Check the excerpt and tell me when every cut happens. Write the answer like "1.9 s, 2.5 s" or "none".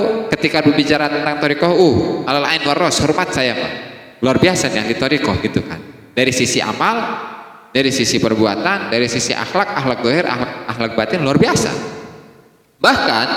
none